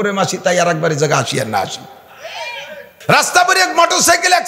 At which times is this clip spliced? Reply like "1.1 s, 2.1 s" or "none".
2.8 s